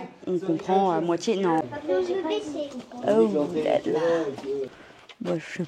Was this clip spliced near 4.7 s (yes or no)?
yes